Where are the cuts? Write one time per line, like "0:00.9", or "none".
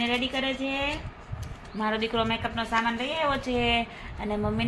none